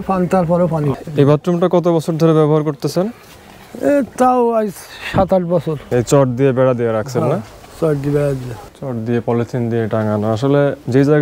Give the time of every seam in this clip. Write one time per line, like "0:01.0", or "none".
0:00.9
0:05.8
0:08.7